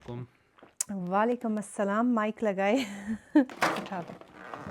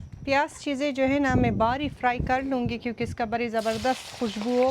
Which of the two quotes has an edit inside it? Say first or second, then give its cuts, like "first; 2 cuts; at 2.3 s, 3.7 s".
first; 1 cut; at 3.5 s